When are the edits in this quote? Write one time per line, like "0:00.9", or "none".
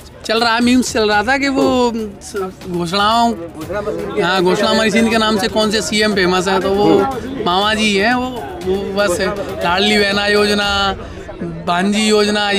none